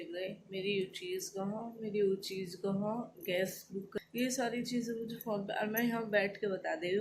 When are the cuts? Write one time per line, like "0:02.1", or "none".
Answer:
0:03.9